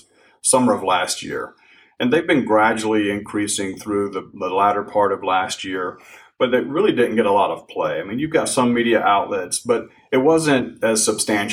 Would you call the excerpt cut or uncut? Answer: uncut